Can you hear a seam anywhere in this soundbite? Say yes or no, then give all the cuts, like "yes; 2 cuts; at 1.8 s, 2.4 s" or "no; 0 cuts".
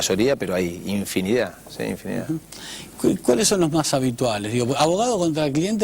yes; 1 cut; at 3.6 s